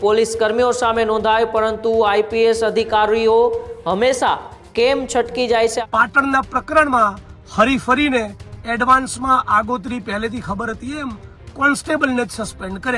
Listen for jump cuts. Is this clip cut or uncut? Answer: cut